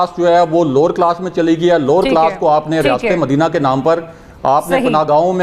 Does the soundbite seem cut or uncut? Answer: uncut